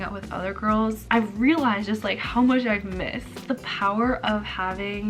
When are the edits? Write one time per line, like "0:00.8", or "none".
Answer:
0:01.1
0:03.4